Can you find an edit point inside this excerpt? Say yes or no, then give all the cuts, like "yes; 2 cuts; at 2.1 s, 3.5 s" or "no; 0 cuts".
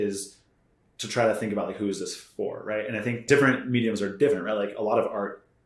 yes; 1 cut; at 3.3 s